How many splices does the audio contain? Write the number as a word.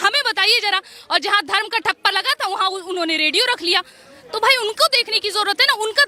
zero